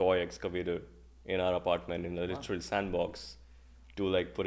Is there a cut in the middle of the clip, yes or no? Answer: no